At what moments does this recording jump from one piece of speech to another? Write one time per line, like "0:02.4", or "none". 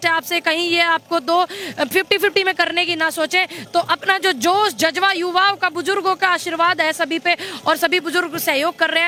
none